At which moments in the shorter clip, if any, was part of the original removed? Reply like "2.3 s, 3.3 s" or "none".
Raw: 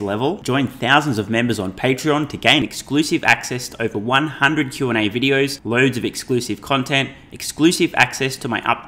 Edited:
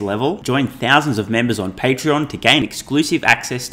none